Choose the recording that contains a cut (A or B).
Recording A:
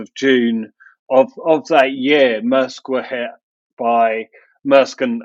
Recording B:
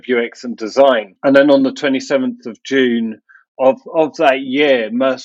B